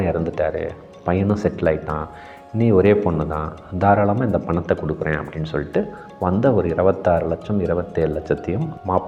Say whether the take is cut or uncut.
uncut